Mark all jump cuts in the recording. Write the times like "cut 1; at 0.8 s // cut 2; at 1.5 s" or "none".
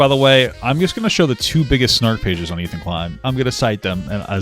cut 1; at 3.2 s